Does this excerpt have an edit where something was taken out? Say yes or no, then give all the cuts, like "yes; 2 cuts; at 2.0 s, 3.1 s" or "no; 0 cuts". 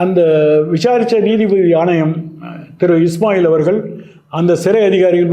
no; 0 cuts